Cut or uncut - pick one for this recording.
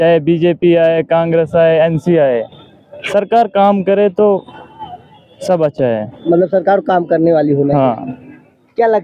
uncut